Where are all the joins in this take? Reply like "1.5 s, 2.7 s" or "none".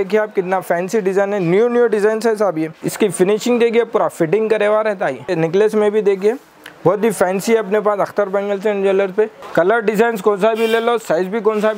2.8 s, 5.3 s, 9.4 s

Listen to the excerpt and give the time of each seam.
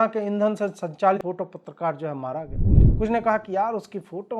1.2 s

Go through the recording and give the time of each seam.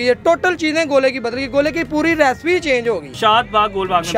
3.1 s

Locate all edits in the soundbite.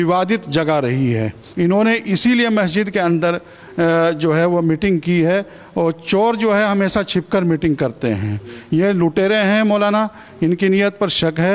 1.4 s

